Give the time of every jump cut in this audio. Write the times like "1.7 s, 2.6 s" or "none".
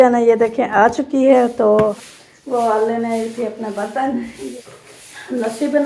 2.0 s, 4.4 s